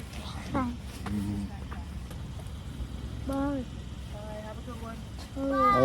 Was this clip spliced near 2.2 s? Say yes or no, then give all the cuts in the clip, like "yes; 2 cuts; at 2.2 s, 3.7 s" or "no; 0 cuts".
yes; 1 cut; at 2.2 s